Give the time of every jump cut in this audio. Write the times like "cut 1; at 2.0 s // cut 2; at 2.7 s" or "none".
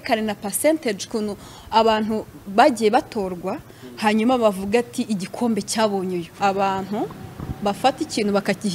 cut 1; at 6.3 s